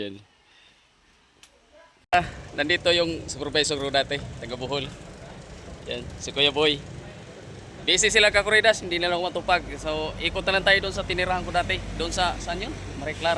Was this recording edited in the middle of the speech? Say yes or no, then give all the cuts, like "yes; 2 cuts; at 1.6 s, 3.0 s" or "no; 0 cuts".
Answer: yes; 1 cut; at 2.1 s